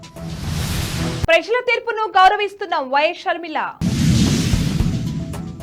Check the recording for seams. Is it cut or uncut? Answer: uncut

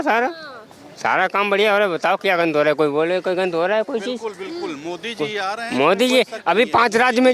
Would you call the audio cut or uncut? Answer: uncut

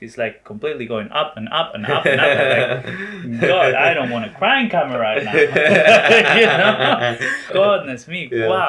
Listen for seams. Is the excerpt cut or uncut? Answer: cut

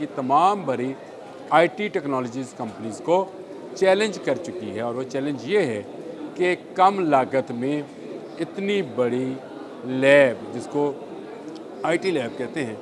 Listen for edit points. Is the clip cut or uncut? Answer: uncut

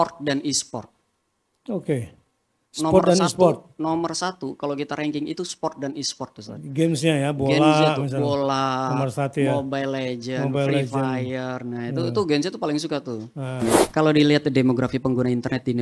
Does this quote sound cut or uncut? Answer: cut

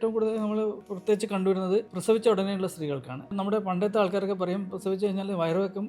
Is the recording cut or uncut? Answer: cut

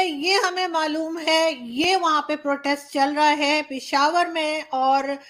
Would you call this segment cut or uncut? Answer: uncut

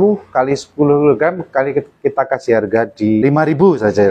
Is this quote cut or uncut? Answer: cut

